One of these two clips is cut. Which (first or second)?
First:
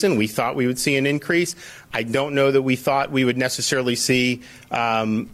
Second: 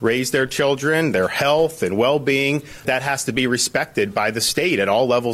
second